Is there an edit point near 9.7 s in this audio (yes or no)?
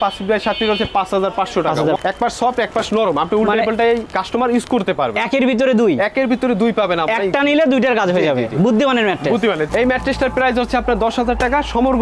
yes